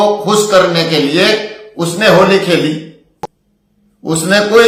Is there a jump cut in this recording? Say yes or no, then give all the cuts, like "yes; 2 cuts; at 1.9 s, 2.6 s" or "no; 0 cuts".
no; 0 cuts